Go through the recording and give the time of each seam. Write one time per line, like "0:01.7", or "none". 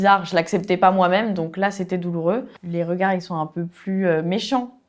0:02.6